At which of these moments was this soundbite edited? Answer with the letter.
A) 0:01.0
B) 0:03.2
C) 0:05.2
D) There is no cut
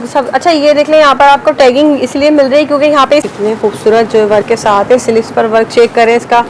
B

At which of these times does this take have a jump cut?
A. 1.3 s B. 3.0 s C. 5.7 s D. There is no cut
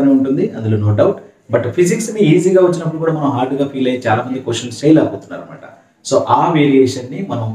D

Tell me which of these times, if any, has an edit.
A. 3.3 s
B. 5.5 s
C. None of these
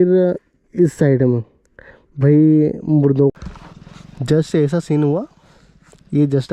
A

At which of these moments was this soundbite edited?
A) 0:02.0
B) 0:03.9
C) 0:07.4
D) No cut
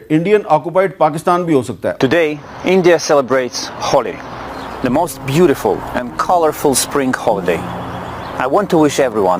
A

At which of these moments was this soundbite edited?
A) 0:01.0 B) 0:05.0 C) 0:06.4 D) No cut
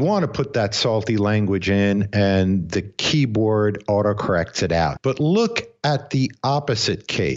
B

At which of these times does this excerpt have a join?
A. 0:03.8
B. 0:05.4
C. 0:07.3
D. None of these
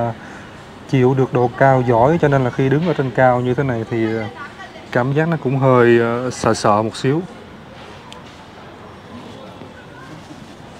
D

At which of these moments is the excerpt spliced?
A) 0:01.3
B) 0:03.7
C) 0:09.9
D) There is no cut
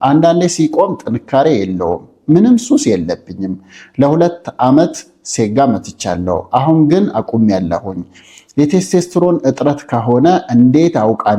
D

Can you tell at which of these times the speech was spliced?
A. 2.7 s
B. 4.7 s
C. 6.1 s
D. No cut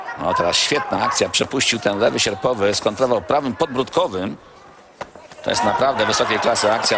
D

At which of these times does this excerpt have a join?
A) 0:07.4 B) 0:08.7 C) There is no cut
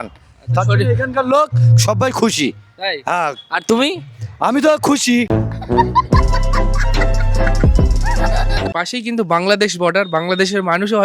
B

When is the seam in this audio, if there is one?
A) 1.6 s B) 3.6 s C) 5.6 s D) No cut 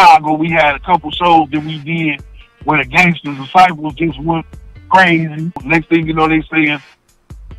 C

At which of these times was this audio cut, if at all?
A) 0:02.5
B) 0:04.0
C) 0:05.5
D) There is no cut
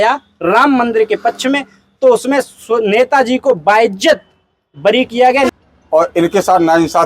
C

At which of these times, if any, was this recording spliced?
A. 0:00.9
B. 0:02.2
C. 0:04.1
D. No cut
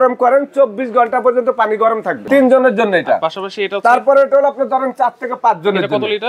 B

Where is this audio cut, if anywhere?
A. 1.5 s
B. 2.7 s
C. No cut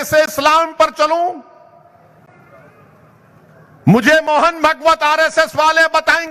C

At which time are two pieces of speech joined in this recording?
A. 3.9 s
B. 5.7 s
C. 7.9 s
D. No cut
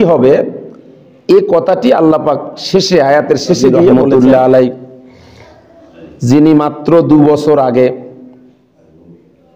A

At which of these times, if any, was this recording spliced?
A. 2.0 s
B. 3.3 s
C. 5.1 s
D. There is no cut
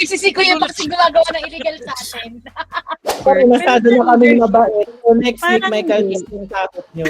B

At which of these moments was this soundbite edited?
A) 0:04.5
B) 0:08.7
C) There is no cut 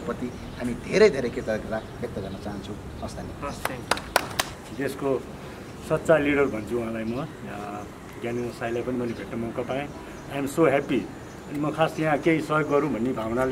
A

